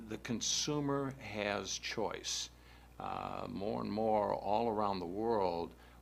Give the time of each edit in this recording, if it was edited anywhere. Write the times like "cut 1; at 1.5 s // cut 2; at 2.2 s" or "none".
cut 1; at 1.4 s